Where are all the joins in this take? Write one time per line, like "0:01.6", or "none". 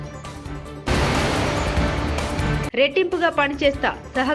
0:00.8
0:02.6